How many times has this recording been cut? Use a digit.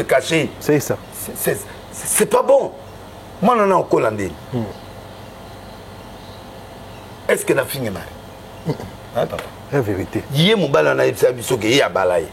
1